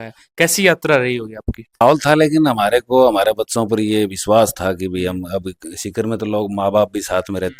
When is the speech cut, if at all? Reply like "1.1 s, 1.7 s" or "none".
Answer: 1.8 s